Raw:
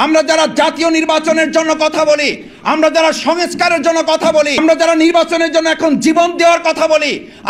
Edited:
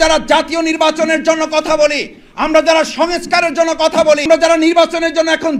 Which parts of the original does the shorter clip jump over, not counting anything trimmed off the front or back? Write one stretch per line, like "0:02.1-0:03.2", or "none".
0:04.5-0:04.6